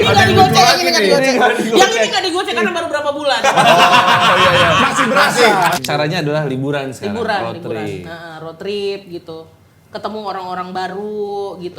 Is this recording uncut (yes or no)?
no